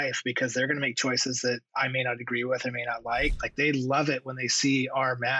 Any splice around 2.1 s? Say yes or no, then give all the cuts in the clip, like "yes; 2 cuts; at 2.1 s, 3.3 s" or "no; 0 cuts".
no; 1 cut; at 3.4 s